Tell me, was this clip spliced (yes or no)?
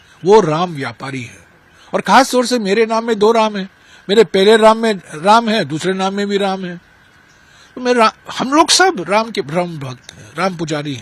no